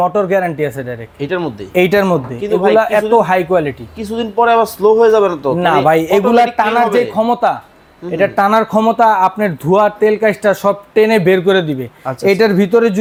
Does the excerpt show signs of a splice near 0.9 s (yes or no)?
no